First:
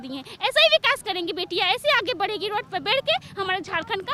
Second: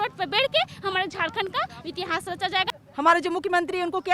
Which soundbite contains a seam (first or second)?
second